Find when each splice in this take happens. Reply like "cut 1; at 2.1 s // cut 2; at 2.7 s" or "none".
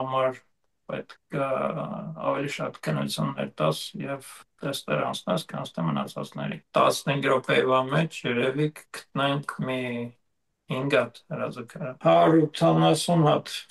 cut 1; at 6.6 s // cut 2; at 11.8 s

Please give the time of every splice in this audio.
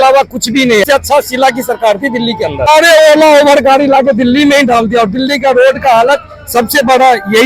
cut 1; at 0.8 s // cut 2; at 2.7 s

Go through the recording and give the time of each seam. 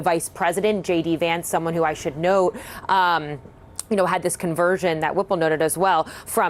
none

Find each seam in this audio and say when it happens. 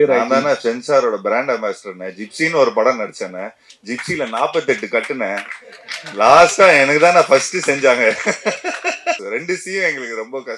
cut 1; at 9.2 s

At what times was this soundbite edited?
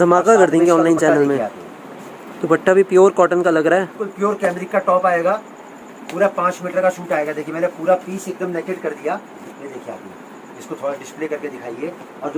cut 1; at 4.0 s

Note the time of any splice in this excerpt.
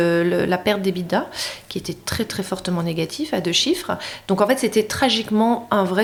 none

